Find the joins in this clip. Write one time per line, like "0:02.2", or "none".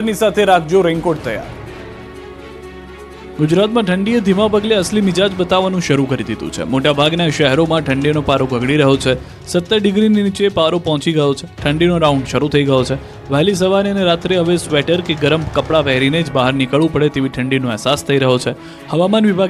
0:17.1